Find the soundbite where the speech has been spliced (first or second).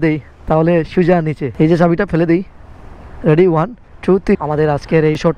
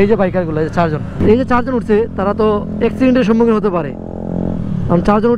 first